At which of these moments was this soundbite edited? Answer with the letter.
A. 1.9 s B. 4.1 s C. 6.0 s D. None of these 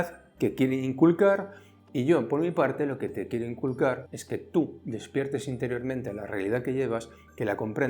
B